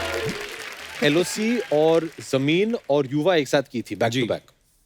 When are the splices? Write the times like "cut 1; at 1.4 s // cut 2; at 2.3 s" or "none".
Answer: cut 1; at 0.9 s